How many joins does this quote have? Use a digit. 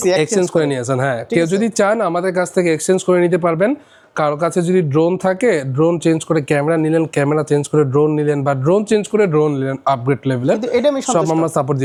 0